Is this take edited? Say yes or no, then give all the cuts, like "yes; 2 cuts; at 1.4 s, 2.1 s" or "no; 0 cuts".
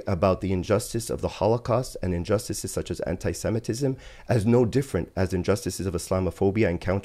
no; 0 cuts